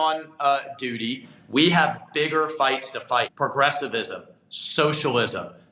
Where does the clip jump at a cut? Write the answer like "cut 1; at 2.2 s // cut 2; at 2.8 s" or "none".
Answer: cut 1; at 1.3 s // cut 2; at 3.3 s